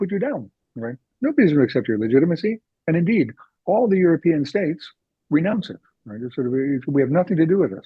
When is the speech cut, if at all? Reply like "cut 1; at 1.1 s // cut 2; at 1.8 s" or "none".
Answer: none